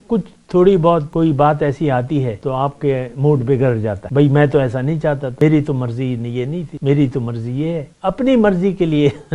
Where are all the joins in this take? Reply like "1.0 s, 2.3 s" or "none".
1.1 s, 2.4 s, 4.0 s, 5.3 s, 6.7 s, 7.9 s